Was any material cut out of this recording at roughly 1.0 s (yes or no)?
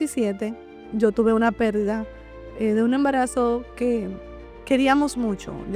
no